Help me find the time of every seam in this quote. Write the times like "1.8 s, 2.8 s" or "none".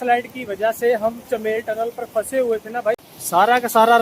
3.0 s